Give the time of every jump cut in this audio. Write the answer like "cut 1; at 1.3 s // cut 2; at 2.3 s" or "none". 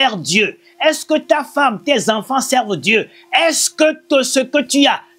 none